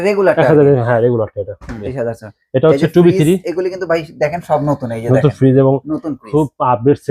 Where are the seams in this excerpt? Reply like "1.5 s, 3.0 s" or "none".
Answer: 1.9 s